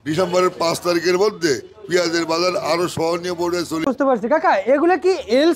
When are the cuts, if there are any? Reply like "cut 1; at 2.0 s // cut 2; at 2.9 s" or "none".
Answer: cut 1; at 3.8 s